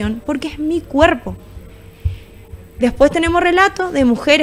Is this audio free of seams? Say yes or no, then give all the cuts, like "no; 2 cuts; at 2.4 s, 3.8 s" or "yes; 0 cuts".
yes; 0 cuts